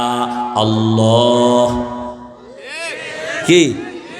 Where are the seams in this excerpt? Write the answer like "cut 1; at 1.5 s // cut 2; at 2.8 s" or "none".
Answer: none